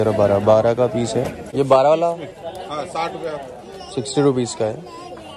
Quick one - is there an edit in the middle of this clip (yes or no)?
no